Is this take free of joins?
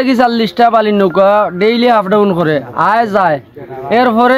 yes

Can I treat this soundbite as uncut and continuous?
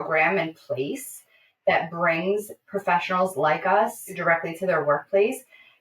no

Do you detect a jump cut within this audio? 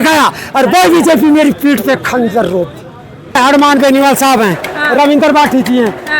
yes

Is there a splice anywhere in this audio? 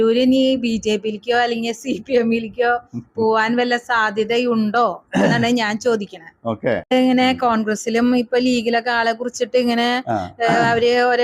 yes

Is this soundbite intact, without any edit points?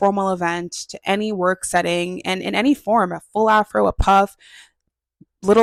yes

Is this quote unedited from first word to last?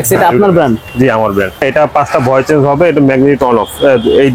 no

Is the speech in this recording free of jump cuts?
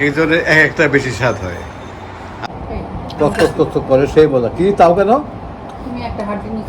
no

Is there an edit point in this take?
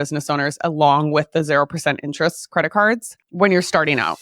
yes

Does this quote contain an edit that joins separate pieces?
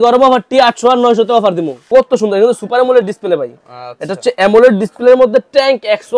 yes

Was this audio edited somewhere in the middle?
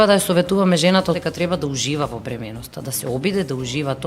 yes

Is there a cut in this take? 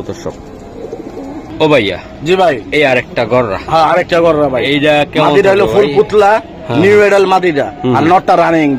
no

